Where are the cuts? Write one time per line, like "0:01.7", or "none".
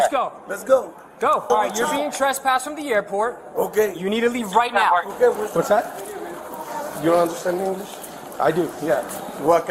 0:01.5
0:05.4

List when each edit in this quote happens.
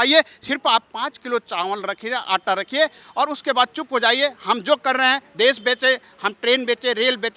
none

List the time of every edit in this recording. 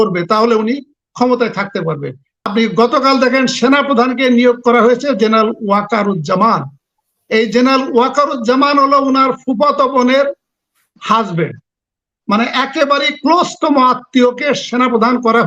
0:02.5

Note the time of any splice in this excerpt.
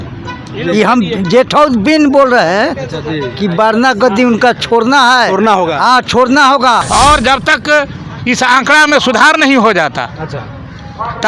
0:06.8

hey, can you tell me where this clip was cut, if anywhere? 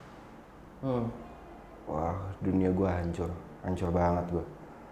none

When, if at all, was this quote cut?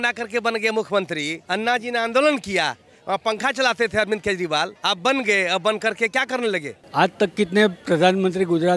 0:01.4
0:04.8
0:06.8

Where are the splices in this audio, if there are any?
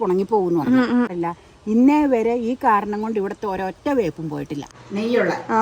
0:01.1
0:04.6

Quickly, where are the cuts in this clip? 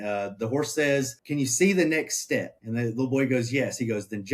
0:01.2
0:02.6

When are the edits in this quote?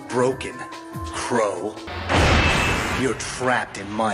0:01.9

